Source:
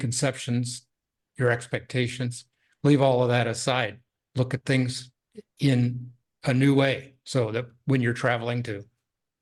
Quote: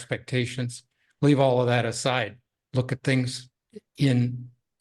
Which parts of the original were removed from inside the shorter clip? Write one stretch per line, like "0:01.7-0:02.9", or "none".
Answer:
none